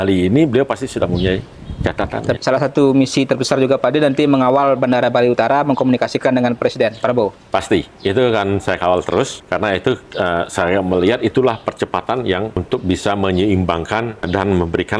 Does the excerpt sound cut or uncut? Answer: cut